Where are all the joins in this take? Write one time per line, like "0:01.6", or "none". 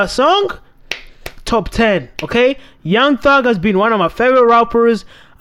none